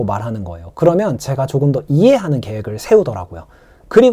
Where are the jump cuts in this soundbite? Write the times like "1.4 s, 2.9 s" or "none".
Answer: none